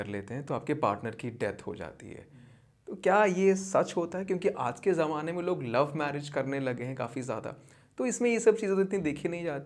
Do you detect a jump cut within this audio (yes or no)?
no